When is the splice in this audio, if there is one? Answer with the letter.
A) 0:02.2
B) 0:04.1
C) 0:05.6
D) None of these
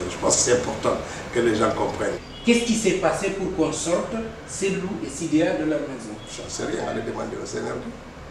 A